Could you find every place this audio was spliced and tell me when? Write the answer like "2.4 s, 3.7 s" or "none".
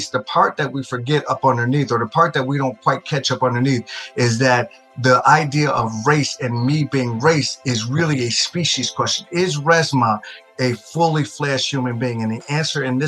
none